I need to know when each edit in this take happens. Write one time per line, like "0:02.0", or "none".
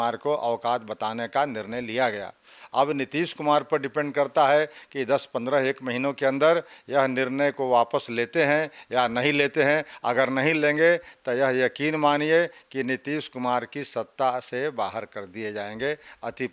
none